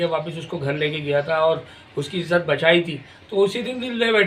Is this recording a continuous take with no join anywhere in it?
yes; 0 cuts

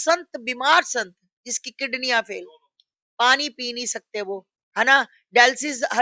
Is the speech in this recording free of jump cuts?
yes; 0 cuts

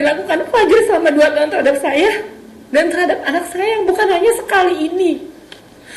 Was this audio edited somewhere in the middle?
no; 0 cuts

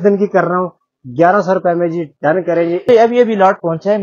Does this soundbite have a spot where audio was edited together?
yes; 1 cut; at 2.9 s

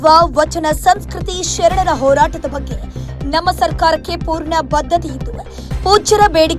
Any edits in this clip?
no; 0 cuts

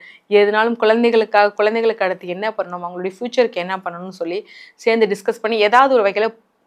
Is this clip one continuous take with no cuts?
yes; 0 cuts

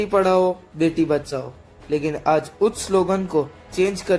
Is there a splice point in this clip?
no; 0 cuts

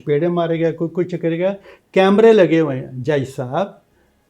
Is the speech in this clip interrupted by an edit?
no; 0 cuts

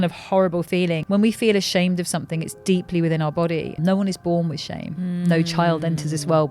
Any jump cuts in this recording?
yes; 3 cuts; at 1.0 s, 3.8 s, 5.0 s

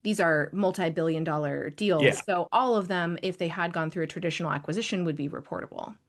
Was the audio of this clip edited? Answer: no; 0 cuts

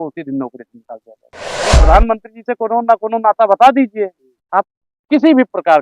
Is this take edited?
yes; 1 cut; at 1.6 s

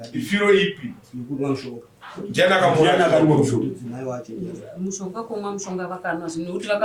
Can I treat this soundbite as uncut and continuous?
yes; 0 cuts

